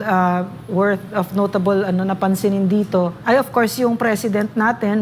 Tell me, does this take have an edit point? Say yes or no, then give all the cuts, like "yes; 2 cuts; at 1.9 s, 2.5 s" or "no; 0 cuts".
yes; 1 cut; at 3.2 s